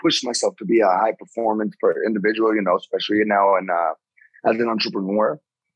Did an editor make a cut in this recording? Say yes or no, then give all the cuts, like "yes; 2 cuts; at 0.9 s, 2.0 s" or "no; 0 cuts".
no; 0 cuts